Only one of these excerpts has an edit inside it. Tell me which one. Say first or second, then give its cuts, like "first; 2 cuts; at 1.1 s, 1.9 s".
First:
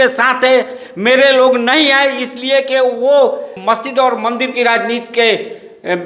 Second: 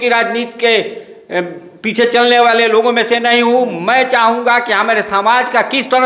first; 1 cut; at 3.5 s